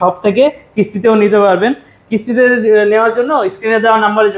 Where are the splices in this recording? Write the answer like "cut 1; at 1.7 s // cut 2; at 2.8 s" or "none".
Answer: none